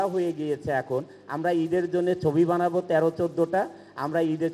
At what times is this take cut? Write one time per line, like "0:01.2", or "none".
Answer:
none